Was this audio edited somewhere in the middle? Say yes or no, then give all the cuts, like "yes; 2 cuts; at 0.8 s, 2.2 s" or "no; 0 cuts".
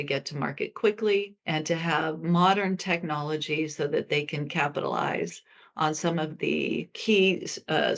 yes; 2 cuts; at 1.4 s, 6.9 s